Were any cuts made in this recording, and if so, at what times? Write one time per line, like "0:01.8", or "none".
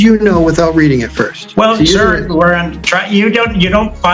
0:01.4